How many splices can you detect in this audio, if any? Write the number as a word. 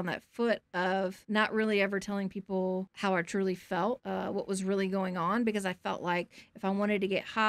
three